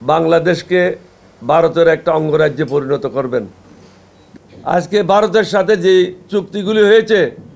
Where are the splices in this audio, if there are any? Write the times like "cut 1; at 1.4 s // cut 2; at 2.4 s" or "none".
cut 1; at 4.5 s